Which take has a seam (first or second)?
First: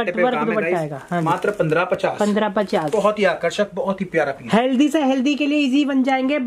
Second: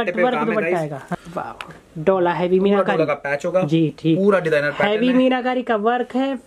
second